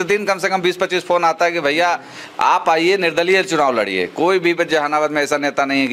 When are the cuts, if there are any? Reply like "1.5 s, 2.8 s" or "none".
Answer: none